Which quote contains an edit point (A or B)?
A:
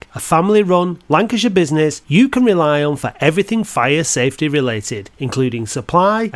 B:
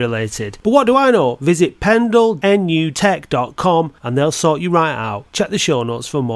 B